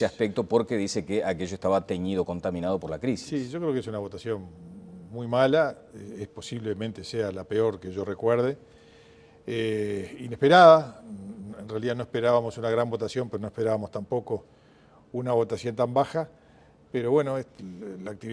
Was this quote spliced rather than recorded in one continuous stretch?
yes; 1 cut; at 12.7 s

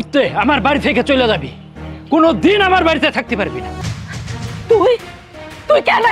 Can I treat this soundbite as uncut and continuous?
no; 1 cut; at 3.8 s

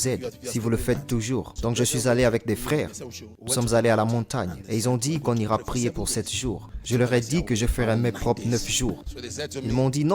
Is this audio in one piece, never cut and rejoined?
no; 3 cuts; at 1.5 s, 6.7 s, 9.2 s

